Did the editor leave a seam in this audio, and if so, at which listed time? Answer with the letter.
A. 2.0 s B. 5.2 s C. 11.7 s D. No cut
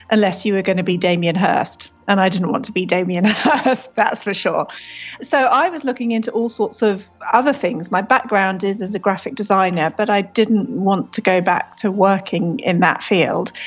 B